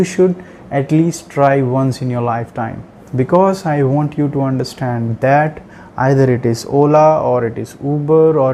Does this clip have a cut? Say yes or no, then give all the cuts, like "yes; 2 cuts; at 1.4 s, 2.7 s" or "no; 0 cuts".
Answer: no; 0 cuts